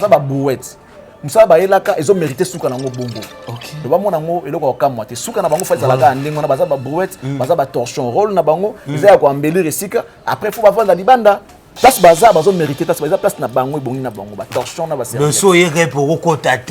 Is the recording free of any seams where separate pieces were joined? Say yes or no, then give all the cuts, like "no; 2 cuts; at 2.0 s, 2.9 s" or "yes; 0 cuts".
yes; 0 cuts